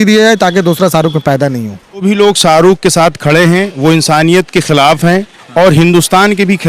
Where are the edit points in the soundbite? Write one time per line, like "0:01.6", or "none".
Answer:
0:02.0